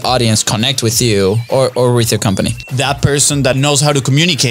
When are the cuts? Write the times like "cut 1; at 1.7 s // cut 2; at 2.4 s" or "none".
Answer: cut 1; at 2.6 s // cut 2; at 3.5 s